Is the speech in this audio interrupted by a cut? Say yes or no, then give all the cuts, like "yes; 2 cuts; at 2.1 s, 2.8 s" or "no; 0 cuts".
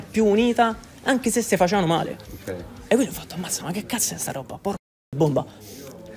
no; 0 cuts